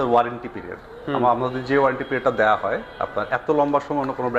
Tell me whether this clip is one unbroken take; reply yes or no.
yes